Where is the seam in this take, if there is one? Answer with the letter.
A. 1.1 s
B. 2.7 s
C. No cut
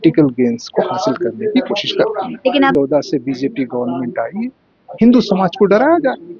B